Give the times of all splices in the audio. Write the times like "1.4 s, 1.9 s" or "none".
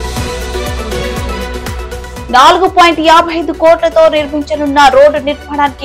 none